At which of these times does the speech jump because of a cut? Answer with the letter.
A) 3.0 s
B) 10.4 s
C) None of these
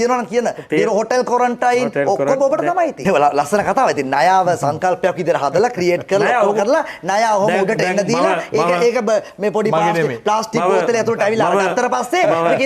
A